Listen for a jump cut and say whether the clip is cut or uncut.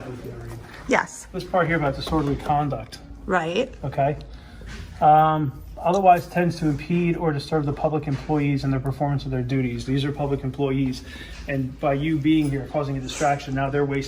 uncut